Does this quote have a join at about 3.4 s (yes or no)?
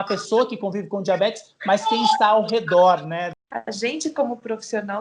yes